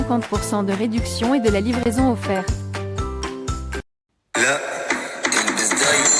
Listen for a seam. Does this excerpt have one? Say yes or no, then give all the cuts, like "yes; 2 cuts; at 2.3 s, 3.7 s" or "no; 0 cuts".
yes; 1 cut; at 3.9 s